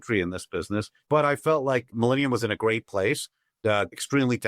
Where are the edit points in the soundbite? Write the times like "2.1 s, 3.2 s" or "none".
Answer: 1.0 s